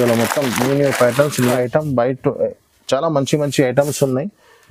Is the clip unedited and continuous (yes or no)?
no